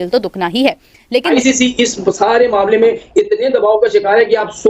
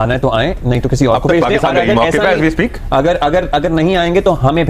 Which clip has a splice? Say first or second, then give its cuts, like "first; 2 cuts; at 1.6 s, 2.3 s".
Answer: first; 1 cut; at 1.3 s